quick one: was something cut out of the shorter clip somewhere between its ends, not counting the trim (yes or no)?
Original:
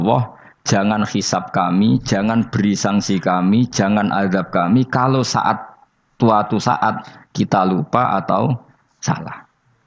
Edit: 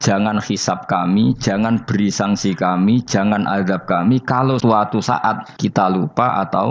yes